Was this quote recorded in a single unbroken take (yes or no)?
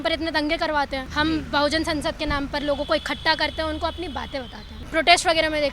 no